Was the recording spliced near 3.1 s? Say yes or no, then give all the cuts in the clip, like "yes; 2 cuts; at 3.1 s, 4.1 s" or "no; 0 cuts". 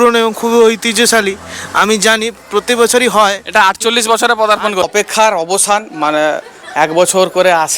no; 1 cut; at 4.9 s